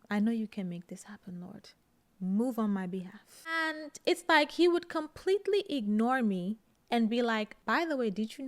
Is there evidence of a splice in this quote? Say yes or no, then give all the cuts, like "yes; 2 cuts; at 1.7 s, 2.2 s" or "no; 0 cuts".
yes; 1 cut; at 3.7 s